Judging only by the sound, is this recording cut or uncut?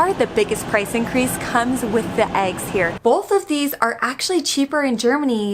cut